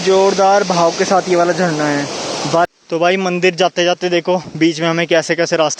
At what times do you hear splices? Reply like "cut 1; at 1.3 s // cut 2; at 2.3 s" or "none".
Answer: cut 1; at 2.7 s